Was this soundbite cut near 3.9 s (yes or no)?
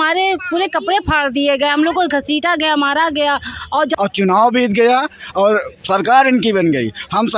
yes